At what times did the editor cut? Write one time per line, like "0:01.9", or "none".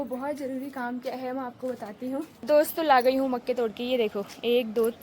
0:02.4

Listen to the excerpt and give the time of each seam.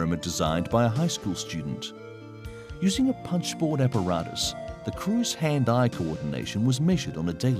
0:02.0

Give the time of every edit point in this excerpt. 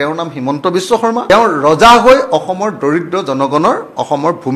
0:01.3

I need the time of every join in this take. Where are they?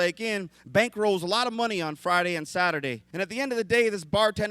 0:03.0

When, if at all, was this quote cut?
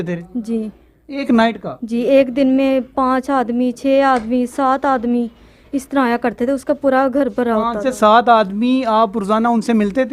none

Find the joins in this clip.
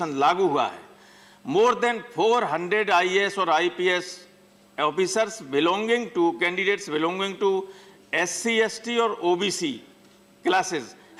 none

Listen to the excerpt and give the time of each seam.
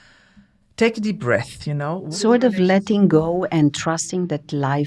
0:02.2

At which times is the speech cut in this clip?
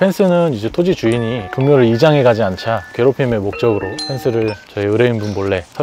none

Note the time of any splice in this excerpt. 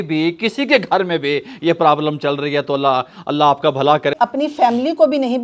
0:04.1

